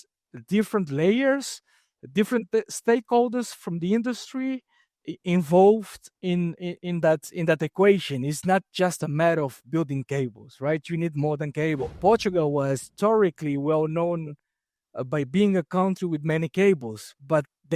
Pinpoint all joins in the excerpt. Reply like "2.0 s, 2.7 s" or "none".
11.9 s